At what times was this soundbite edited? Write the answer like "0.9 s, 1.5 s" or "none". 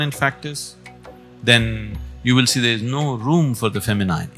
none